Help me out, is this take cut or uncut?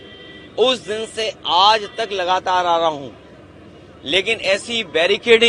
uncut